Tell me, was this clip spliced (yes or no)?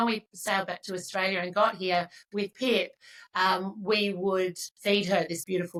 no